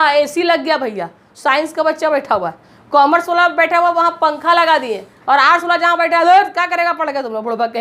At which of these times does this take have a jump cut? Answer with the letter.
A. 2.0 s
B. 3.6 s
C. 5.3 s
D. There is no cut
D